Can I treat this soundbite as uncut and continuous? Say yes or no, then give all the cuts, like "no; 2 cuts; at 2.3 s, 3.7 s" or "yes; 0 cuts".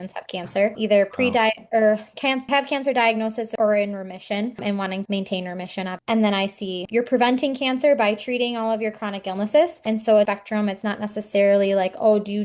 no; 6 cuts; at 0.8 s, 2.5 s, 3.5 s, 4.6 s, 6.8 s, 9.8 s